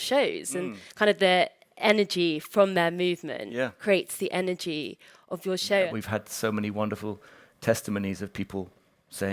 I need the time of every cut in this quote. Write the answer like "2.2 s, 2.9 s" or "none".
5.9 s